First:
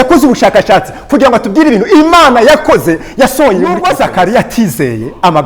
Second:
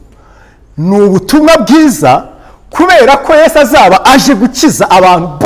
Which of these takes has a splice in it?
first; 1 cut; at 3.8 s

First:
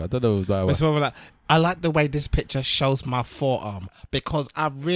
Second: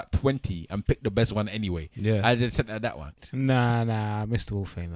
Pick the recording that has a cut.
second; 1 cut; at 3.1 s

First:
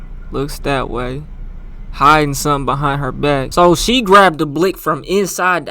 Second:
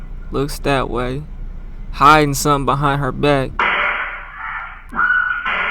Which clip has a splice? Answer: second; 2 cuts; at 3.5 s, 4.8 s

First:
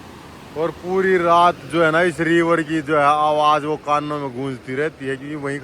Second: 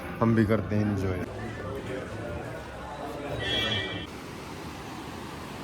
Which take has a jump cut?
second; 2 cuts; at 1.3 s, 4.1 s

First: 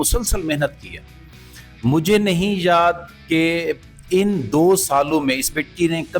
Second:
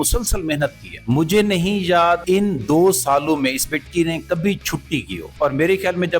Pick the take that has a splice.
second; 3 cuts; at 0.9 s, 2.2 s, 5.2 s

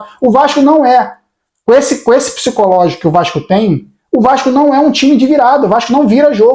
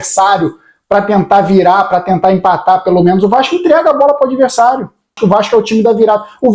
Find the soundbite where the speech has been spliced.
second; 1 cut; at 5.1 s

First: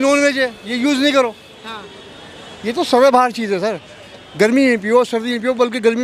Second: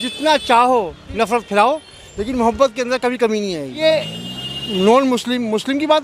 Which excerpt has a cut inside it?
second; 1 cut; at 3.8 s

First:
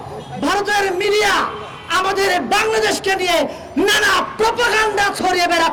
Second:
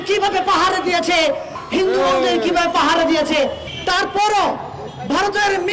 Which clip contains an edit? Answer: second; 2 cuts; at 1.6 s, 3.7 s

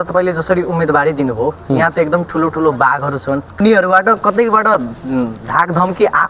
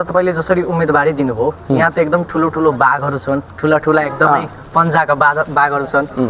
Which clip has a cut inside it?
first; 1 cut; at 3.5 s

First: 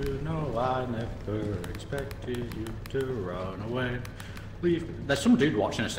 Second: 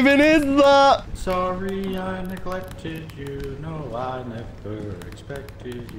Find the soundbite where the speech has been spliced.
second; 1 cut; at 1.1 s

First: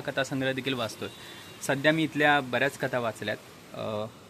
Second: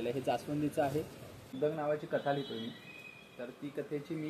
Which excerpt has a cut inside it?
second; 1 cut; at 1.5 s

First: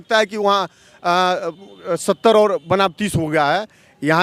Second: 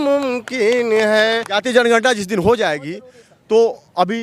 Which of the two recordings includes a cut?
second; 1 cut; at 1.5 s

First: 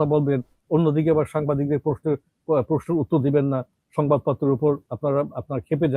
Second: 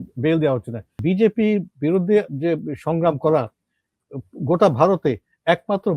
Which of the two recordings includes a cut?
second; 1 cut; at 1.0 s

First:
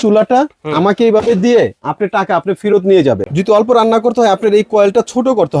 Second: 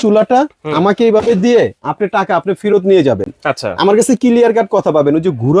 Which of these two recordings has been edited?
first; 1 cut; at 3.3 s

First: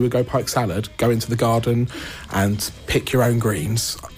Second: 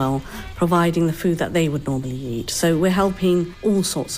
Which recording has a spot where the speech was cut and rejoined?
first; 1 cut; at 2.7 s

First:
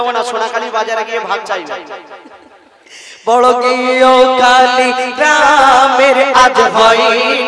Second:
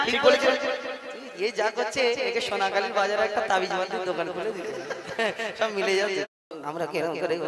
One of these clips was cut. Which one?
second; 1 cut; at 6.3 s

